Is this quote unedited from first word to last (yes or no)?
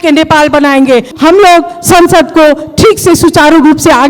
no